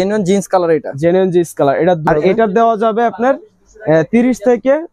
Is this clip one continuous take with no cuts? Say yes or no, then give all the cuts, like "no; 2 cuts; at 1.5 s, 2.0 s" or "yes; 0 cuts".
no; 1 cut; at 2.0 s